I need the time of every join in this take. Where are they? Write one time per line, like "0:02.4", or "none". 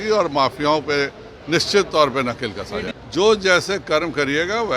0:02.9